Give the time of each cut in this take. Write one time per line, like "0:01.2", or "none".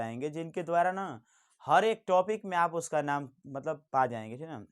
none